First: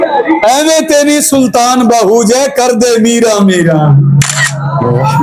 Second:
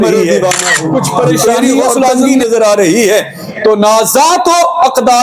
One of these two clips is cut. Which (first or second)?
second